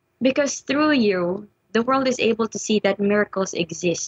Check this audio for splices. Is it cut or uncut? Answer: cut